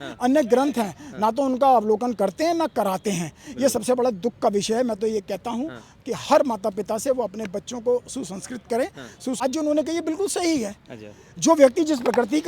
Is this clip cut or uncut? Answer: cut